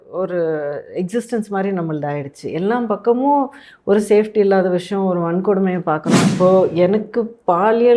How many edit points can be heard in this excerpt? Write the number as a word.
one